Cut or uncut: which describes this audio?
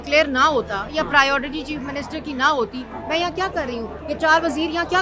uncut